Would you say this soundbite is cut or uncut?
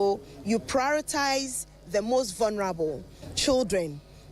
cut